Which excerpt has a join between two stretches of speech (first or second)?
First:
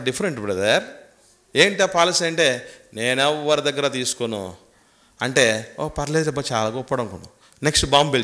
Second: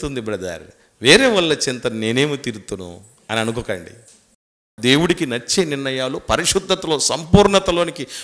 second